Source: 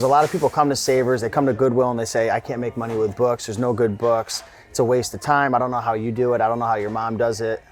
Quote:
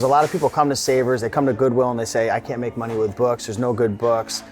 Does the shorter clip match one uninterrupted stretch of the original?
yes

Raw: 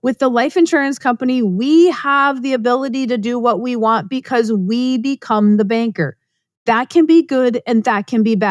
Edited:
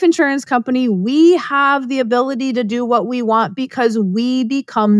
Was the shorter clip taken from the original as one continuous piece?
yes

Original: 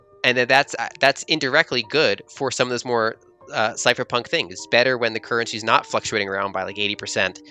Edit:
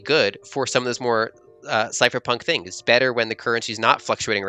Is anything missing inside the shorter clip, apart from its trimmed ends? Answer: no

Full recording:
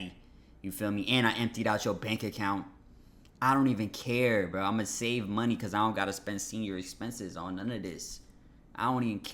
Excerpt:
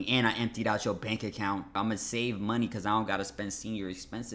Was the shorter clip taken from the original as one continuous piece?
no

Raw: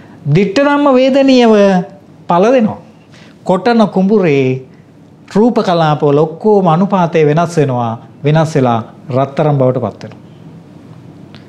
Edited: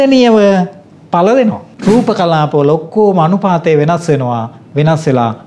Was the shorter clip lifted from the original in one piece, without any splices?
no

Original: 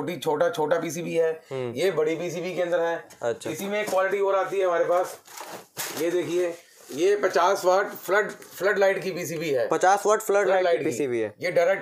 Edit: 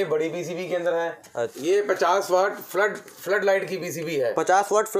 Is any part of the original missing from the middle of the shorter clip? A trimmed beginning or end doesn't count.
yes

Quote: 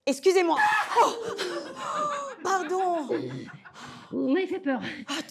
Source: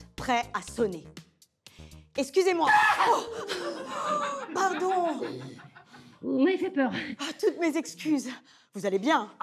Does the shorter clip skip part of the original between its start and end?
no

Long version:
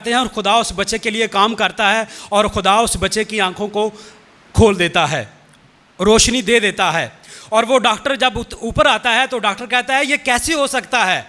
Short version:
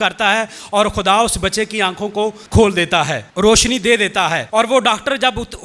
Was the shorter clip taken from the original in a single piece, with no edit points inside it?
no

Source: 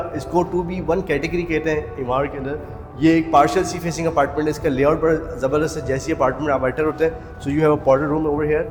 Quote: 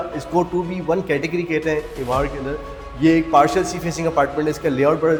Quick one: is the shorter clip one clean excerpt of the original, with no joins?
yes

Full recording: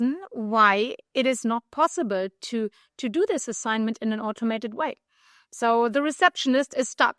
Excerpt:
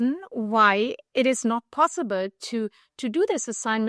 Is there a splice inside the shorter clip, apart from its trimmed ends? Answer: no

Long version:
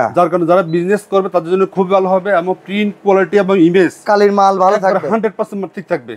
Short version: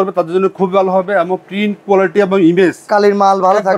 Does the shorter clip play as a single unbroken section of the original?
yes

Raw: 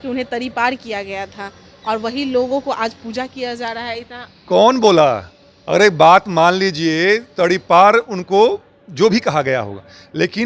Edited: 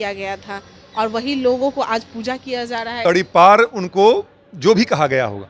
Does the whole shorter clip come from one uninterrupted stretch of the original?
no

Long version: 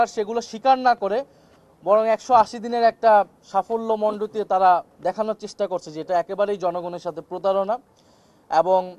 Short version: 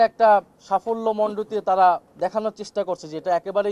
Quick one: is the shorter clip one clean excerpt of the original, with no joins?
yes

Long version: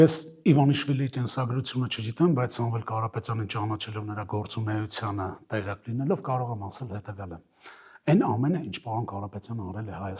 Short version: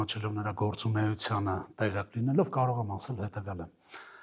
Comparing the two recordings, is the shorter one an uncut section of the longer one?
yes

